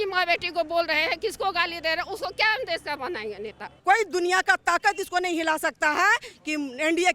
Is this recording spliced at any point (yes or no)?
yes